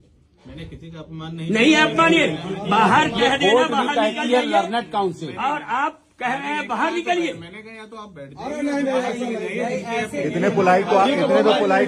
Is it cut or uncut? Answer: uncut